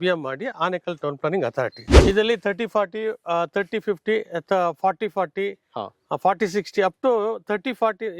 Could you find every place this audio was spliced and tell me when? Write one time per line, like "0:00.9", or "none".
0:01.9